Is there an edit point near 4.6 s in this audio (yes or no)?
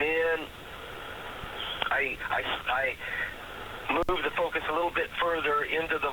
no